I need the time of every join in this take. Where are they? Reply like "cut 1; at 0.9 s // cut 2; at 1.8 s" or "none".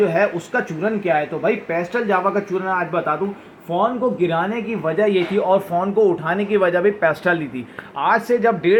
none